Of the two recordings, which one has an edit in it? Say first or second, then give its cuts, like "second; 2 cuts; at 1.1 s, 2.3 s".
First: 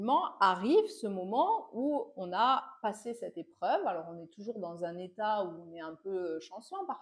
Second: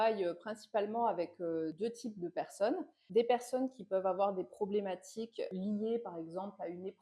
second; 3 cuts; at 1.7 s, 3.0 s, 5.5 s